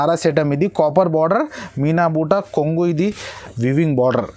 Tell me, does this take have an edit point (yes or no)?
yes